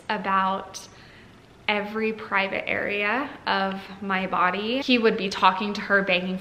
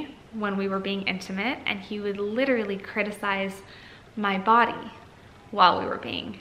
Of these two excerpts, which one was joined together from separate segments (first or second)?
first